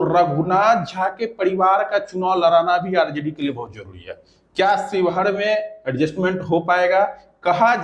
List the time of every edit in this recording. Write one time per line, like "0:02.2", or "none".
none